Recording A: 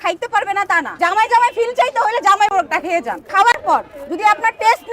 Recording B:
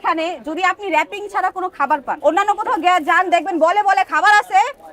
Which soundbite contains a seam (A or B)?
A